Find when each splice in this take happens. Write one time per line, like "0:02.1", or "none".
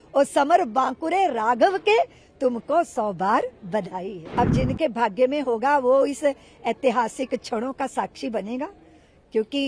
0:04.2